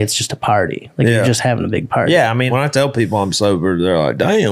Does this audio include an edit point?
yes; 1 cut; at 2.5 s

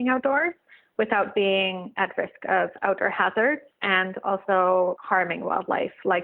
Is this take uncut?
no; 2 cuts; at 3.7 s, 5.0 s

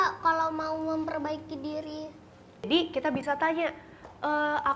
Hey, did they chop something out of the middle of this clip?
yes; 1 cut; at 2.7 s

